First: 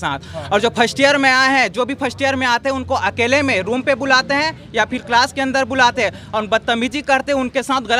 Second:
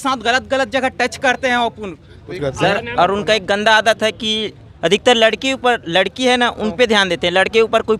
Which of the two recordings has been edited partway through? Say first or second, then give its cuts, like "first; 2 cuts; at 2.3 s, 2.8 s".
second; 1 cut; at 2.4 s